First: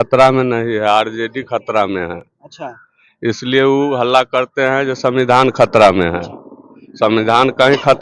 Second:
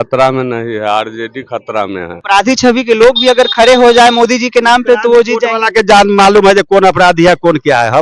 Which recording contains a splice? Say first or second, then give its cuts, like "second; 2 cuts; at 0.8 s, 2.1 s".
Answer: second; 1 cut; at 2.2 s